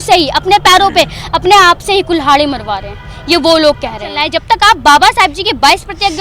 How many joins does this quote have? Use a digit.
1